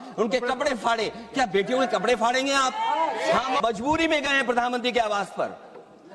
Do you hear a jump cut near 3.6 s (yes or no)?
yes